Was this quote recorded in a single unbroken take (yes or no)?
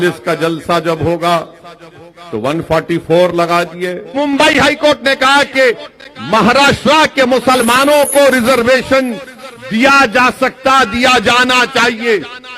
no